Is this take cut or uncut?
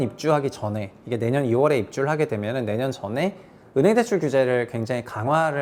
uncut